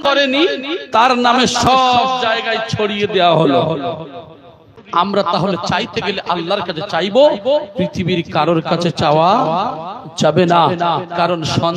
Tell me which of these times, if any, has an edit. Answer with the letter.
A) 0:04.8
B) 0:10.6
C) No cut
A